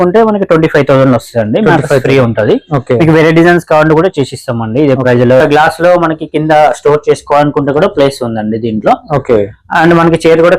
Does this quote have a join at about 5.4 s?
yes; 1 cut; at 5.4 s

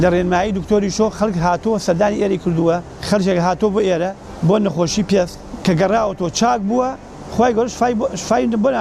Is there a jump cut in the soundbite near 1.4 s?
no; 3 cuts; at 2.9 s, 4.2 s, 5.4 s

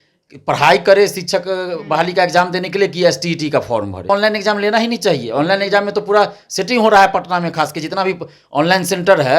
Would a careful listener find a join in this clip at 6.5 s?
no; 1 cut; at 4.1 s

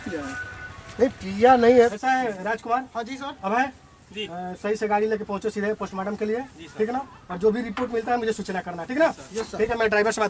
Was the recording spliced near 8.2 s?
no; 1 cut; at 1.9 s

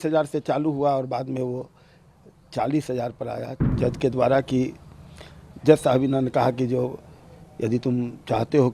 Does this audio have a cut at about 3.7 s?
yes; 1 cut; at 3.7 s

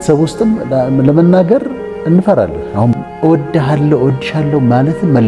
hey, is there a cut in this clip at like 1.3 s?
no; 1 cut; at 3.0 s

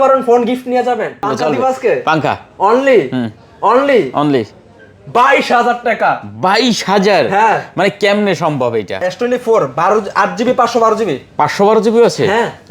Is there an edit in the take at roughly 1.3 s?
yes; 2 cuts; at 1.3 s, 9.0 s

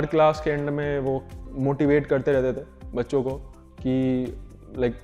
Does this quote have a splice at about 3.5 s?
no; 1 cut; at 1.4 s

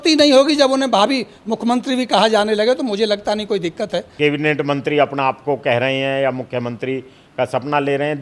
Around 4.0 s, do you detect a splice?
yes; 1 cut; at 4.0 s

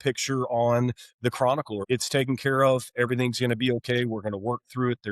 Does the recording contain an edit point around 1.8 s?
yes; 1 cut; at 1.8 s

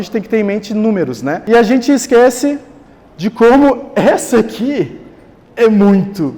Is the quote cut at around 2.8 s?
no; 1 cut; at 1.4 s

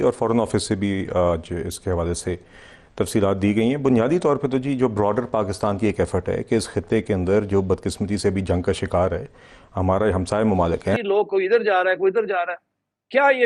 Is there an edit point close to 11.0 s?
yes; 1 cut; at 11.0 s

